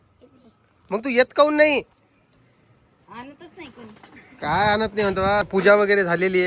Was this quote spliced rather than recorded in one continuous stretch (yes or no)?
yes